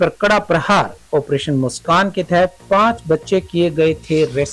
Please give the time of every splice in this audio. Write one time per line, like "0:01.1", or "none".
none